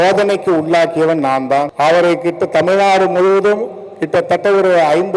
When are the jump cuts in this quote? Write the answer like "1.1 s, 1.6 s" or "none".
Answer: 1.7 s